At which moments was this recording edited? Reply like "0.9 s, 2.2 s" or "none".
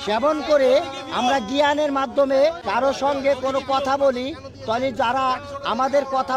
2.6 s